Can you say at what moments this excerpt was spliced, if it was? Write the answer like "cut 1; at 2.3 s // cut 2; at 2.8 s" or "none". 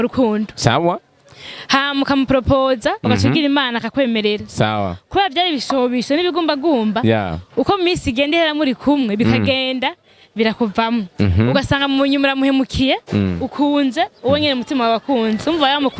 none

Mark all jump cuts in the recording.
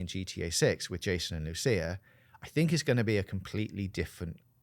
none

